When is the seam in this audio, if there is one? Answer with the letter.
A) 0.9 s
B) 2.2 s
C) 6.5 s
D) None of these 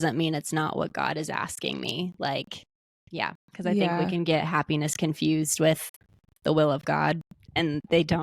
A